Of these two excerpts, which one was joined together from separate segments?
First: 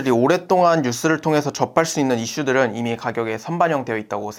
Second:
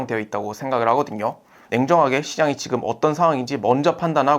second; 1 cut; at 1.6 s

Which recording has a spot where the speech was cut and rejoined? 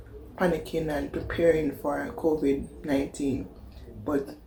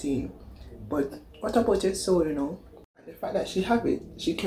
second; 1 cut; at 3.1 s

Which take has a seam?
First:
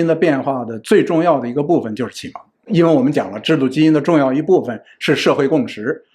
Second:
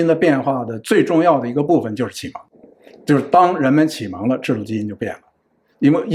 first; 1 cut; at 2.7 s

